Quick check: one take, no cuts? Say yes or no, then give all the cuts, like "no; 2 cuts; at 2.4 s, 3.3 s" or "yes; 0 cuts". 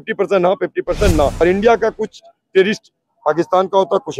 no; 1 cut; at 1.3 s